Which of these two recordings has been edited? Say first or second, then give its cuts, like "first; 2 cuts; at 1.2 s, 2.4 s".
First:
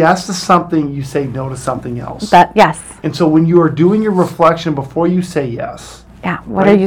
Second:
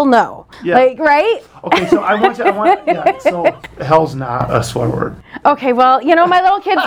second; 1 cut; at 3.7 s